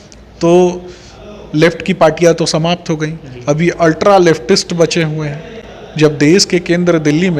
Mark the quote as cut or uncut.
uncut